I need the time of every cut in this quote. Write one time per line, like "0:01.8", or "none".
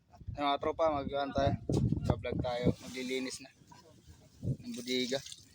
none